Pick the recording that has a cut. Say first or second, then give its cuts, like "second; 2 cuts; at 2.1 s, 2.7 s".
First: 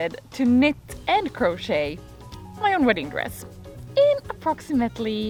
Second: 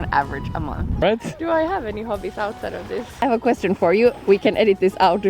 second; 3 cuts; at 1.0 s, 3.1 s, 4.2 s